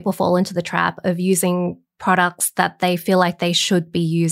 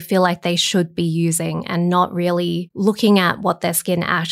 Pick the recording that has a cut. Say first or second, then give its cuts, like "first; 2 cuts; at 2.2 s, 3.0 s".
second; 1 cut; at 2.7 s